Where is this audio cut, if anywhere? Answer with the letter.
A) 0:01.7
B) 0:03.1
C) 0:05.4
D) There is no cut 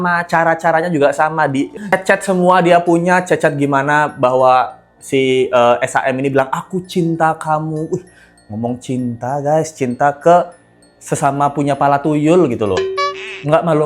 A